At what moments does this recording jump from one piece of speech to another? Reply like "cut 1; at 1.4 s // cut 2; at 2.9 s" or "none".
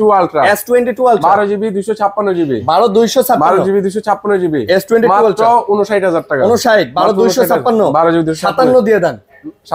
none